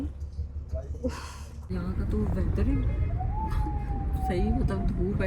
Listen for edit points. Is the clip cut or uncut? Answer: cut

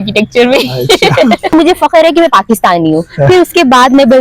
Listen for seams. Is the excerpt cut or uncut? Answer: cut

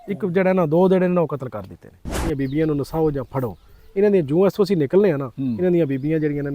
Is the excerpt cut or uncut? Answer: cut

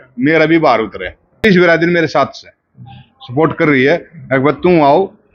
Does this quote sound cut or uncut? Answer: cut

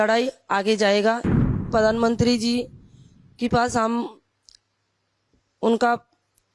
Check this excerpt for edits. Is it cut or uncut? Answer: cut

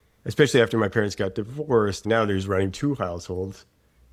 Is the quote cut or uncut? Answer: cut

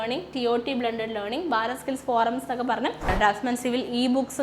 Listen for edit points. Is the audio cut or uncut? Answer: cut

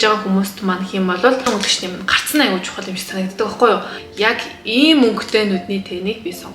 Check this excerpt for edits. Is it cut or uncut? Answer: cut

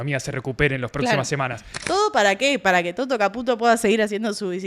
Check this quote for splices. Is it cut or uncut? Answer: cut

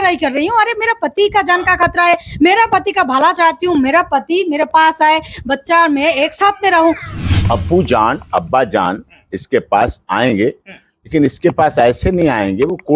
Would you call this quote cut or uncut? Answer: cut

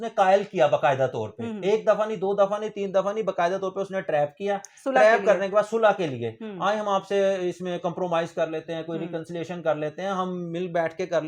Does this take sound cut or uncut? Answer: uncut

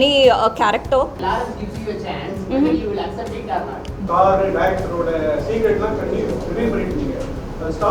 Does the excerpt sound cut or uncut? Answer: cut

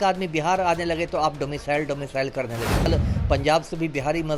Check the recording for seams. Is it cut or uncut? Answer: cut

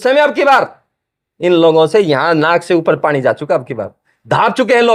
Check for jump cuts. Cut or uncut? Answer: cut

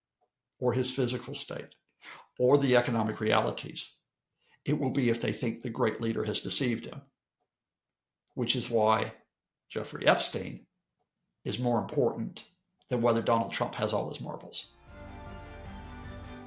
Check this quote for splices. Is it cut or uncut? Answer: cut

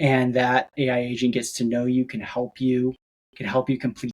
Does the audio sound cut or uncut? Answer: uncut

